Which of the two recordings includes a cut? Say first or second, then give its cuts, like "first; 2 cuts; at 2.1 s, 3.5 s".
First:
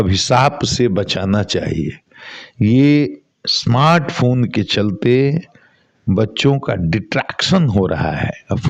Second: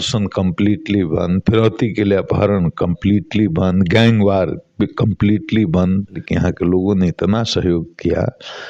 second; 1 cut; at 6.2 s